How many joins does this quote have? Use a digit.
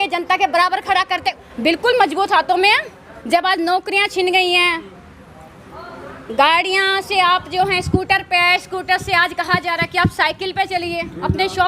1